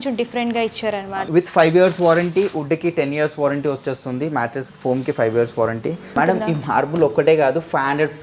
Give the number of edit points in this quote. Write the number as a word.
two